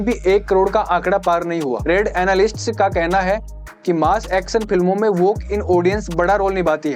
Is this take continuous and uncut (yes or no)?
yes